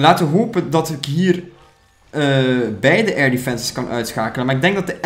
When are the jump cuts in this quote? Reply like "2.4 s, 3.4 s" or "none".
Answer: none